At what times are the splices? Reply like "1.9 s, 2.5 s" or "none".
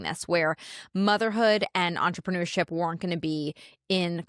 none